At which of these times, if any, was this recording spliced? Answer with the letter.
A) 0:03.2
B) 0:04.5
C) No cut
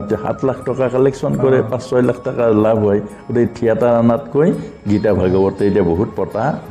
C